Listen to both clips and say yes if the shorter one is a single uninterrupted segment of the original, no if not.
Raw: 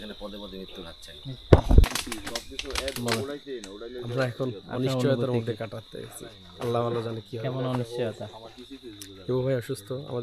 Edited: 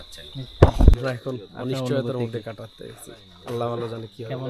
no